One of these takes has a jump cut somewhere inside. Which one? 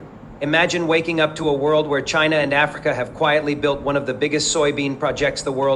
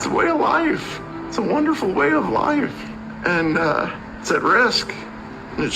second; 1 cut; at 2.9 s

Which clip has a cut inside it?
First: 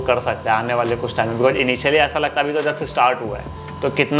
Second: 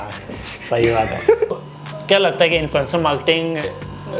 second; 1 cut; at 1.5 s

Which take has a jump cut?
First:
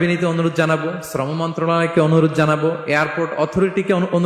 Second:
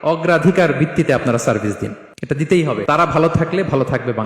second; 2 cuts; at 2.1 s, 2.8 s

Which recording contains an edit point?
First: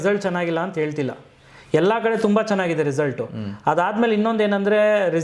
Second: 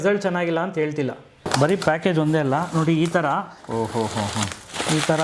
second; 1 cut; at 1.5 s

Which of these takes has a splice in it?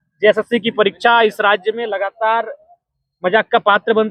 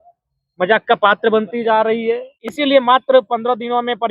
second; 1 cut; at 2.5 s

